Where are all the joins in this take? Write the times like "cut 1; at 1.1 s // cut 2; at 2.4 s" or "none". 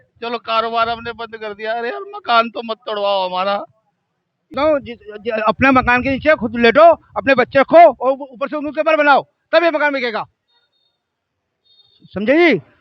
cut 1; at 4.5 s

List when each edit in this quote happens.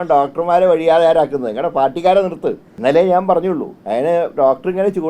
cut 1; at 2.7 s // cut 2; at 3.7 s

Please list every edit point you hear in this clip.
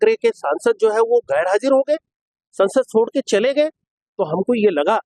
none

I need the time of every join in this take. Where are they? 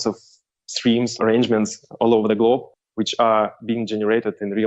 cut 1; at 1.1 s

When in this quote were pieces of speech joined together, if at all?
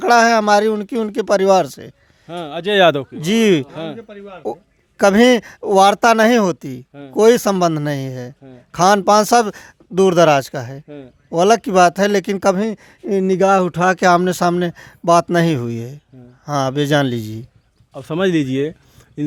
none

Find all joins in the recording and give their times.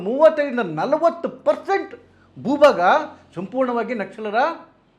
none

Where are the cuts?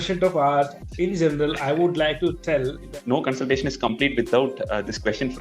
cut 1; at 2.9 s

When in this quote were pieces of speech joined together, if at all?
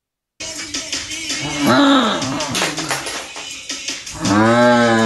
cut 1; at 4.0 s

